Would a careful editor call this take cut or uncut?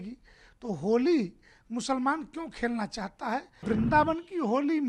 cut